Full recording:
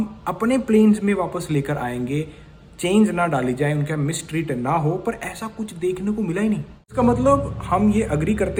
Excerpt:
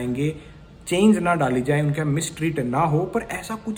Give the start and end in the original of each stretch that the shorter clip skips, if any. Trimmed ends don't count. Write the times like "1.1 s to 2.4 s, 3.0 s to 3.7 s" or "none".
none